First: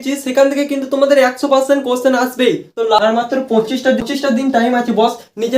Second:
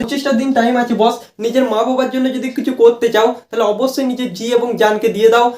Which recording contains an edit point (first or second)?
first